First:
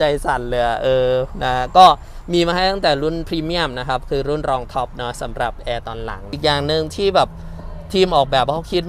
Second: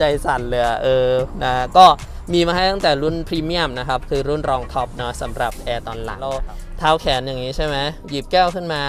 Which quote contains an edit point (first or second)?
second